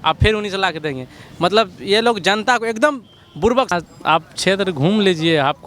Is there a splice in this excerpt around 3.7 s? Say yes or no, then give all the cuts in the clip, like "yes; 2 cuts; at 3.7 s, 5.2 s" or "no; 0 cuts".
yes; 1 cut; at 3.7 s